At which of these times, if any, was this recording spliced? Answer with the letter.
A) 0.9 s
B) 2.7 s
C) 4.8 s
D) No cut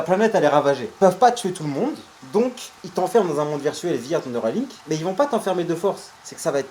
D